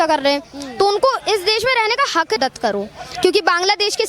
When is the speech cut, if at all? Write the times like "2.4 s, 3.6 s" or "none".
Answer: 2.4 s

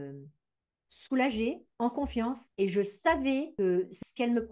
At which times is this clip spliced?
2.2 s, 3.5 s

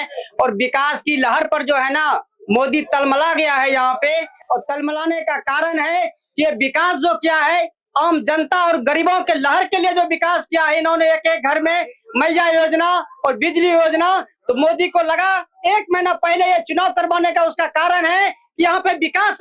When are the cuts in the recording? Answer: none

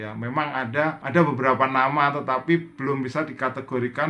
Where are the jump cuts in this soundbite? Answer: 1.0 s

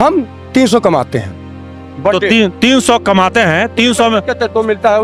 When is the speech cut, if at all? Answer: none

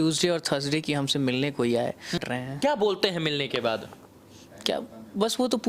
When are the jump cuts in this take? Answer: 2.2 s

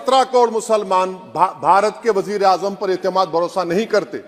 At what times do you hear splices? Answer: none

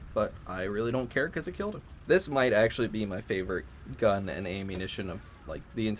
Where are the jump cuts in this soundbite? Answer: 1.9 s

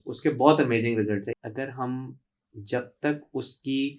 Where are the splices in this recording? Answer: 1.3 s

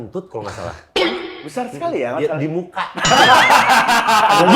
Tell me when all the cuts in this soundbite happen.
none

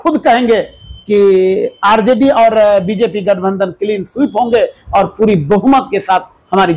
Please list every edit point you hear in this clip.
none

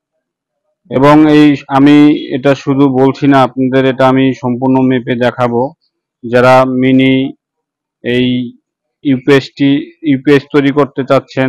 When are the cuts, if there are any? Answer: none

